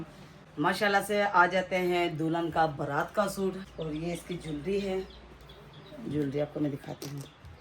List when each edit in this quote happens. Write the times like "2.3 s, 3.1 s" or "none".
3.7 s